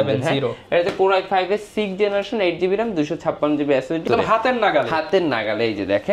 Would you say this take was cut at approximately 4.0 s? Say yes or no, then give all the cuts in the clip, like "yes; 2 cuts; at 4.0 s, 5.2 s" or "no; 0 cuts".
yes; 1 cut; at 4.0 s